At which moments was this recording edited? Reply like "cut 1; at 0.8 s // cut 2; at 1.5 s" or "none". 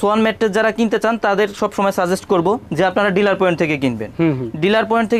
none